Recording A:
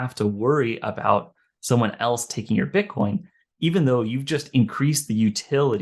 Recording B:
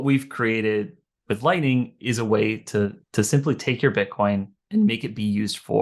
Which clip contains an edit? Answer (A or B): B